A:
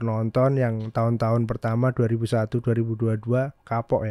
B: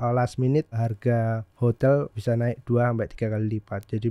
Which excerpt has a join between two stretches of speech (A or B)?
B